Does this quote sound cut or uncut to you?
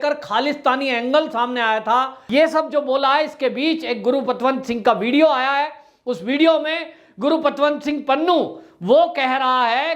cut